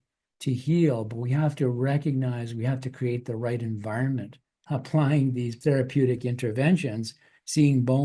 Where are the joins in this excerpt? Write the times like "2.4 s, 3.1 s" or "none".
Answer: 4.6 s, 5.6 s